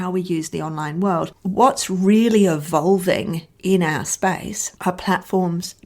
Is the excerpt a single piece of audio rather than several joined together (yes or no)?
no